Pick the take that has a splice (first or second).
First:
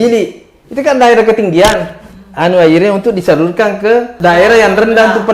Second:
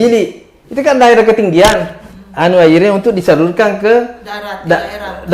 first